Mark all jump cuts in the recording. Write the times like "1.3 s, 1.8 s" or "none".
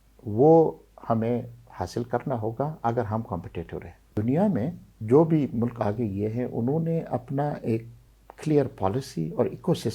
4.1 s